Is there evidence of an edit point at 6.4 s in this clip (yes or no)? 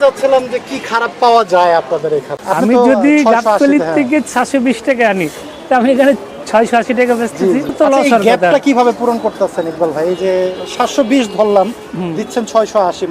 no